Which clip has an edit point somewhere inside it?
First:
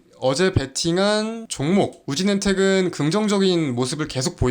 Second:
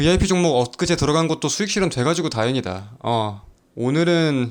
first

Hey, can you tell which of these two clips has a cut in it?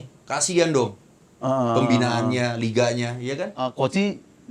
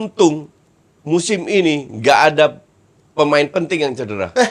first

